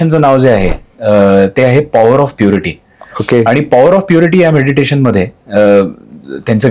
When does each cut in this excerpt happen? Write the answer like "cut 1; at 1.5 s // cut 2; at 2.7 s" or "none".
none